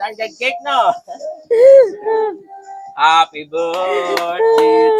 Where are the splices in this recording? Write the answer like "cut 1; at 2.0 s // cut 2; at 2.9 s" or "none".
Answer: none